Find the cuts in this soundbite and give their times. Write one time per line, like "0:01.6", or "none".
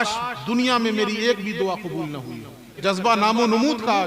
0:02.8